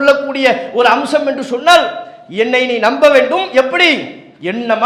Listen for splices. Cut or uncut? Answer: uncut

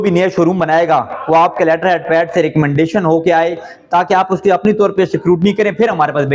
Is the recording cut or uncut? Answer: uncut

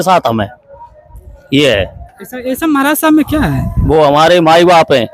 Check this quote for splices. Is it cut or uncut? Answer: uncut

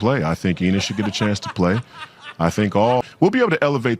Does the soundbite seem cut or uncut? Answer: cut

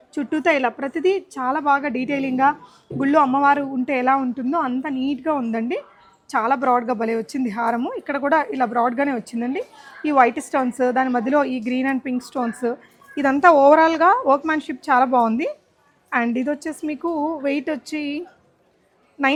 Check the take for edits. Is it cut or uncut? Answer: uncut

